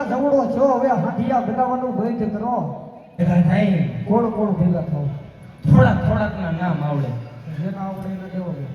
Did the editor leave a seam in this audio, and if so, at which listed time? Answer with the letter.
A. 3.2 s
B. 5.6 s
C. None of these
A